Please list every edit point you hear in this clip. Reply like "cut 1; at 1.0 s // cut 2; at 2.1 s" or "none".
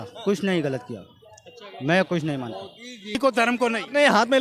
cut 1; at 3.1 s